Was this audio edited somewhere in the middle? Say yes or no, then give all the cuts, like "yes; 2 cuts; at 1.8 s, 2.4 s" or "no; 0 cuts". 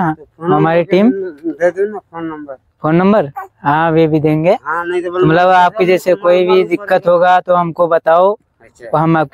no; 0 cuts